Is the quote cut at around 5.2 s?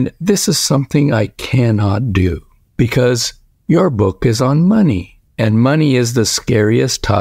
no; 0 cuts

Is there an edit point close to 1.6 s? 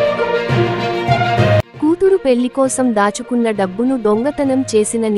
yes; 1 cut; at 1.6 s

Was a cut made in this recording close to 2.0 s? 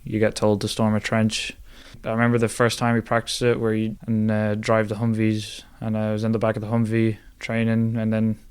yes; 2 cuts; at 2.0 s, 4.0 s

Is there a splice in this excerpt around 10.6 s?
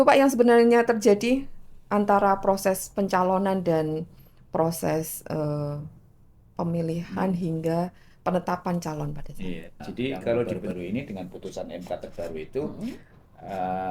yes; 1 cut; at 10.6 s

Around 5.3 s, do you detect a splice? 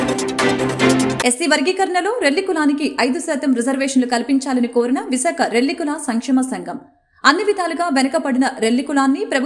no; 1 cut; at 1.2 s

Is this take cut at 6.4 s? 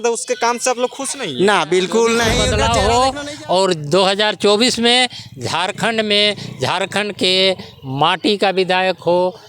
no; 1 cut; at 2.4 s

